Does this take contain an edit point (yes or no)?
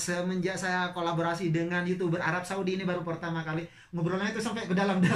no